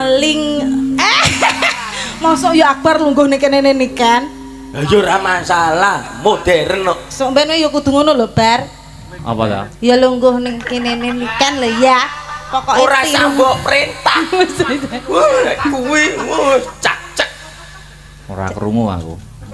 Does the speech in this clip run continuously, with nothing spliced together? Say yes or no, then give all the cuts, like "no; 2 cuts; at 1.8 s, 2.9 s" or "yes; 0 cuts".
yes; 0 cuts